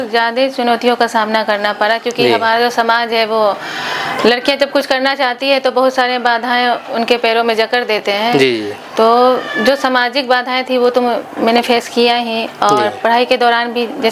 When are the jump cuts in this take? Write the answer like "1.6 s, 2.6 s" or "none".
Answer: none